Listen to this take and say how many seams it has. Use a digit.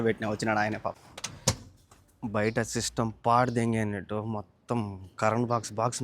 1